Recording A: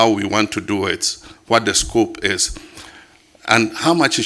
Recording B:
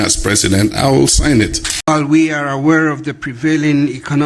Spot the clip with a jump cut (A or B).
B